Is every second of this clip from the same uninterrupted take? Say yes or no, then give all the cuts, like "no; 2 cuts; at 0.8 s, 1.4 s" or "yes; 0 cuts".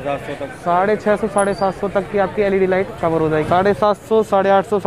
no; 1 cut; at 3.4 s